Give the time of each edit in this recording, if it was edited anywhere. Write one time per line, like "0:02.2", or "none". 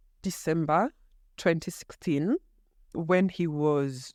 none